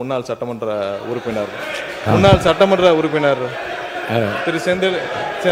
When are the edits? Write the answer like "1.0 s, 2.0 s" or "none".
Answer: none